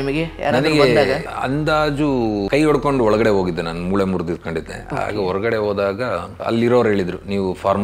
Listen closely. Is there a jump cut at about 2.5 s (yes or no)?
yes